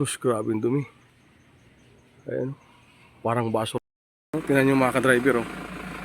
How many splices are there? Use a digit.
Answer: 1